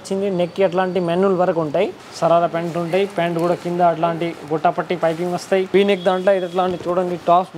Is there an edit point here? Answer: yes; 2 cuts; at 2.0 s, 5.7 s

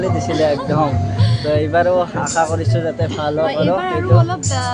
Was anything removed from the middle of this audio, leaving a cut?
no; 0 cuts

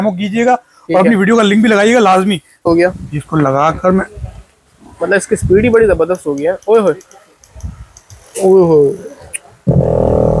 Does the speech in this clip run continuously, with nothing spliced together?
no; 1 cut; at 2.6 s

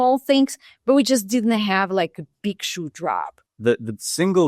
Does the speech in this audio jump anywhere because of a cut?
yes; 1 cut; at 3.4 s

